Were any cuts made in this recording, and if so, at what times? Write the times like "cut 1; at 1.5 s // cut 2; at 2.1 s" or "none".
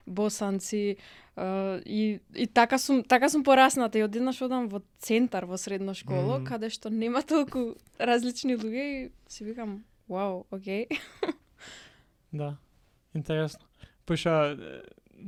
none